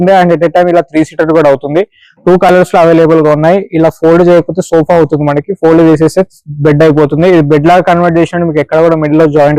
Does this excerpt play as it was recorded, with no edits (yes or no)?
yes